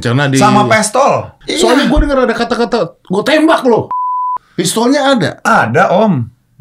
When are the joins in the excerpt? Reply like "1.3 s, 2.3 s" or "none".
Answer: 1.4 s, 4.0 s

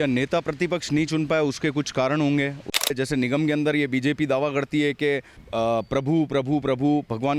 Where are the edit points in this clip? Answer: 2.9 s, 5.4 s

